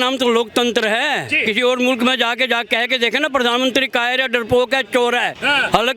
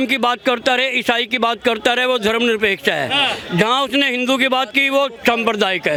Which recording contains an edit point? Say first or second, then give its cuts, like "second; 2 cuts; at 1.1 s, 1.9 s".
first; 1 cut; at 1.4 s